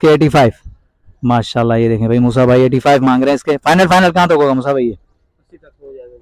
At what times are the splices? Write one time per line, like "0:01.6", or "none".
none